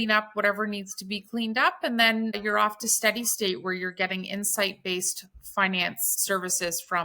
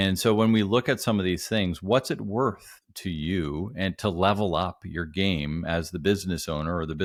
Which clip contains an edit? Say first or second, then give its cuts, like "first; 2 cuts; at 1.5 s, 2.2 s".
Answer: first; 2 cuts; at 2.4 s, 6.1 s